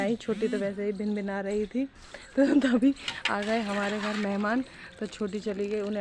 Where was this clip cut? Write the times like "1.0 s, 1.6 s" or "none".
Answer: none